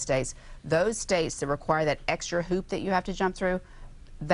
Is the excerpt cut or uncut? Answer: uncut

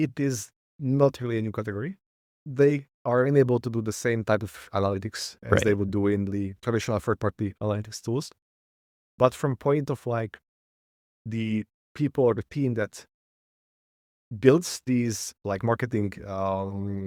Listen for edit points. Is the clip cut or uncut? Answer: uncut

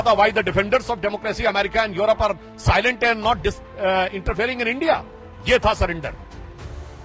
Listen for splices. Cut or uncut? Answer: cut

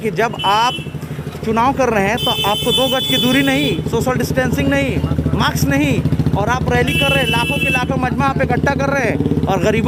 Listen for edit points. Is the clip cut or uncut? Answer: uncut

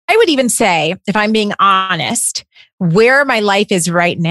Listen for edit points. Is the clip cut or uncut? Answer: uncut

